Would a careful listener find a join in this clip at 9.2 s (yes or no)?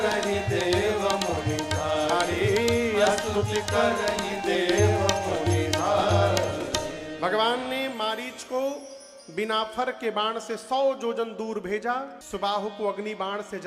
no